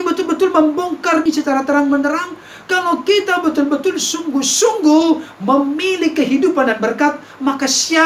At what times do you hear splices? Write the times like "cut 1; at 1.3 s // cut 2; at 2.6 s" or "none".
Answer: cut 1; at 1.2 s